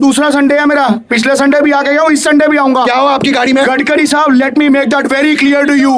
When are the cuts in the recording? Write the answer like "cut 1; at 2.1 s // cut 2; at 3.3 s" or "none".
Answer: none